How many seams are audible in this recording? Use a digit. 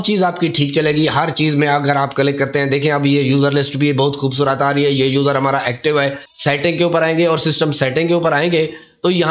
1